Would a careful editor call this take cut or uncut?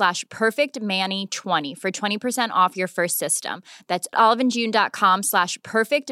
cut